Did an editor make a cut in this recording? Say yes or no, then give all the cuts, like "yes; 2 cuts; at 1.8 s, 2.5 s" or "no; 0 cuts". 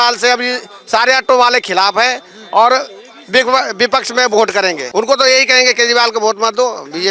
yes; 1 cut; at 4.8 s